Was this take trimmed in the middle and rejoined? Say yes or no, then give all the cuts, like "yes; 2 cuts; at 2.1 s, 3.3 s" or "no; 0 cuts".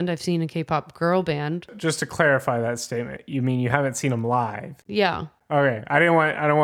yes; 2 cuts; at 1.8 s, 5.1 s